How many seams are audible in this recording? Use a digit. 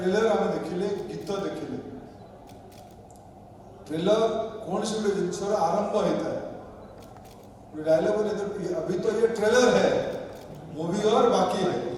0